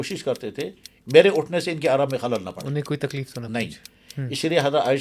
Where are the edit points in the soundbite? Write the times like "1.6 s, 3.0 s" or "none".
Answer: 0.9 s